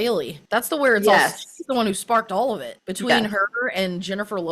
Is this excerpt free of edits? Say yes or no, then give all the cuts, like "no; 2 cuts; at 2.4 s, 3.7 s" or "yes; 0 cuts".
yes; 0 cuts